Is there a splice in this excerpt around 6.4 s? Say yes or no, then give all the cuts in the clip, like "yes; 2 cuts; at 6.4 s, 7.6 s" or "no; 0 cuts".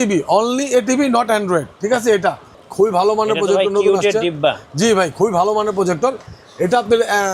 no; 1 cut; at 2.5 s